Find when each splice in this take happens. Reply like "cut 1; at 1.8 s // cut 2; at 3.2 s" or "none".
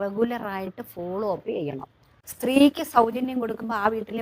cut 1; at 2.1 s